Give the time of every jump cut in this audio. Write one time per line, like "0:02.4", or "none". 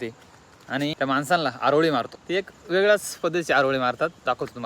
0:00.9
0:02.2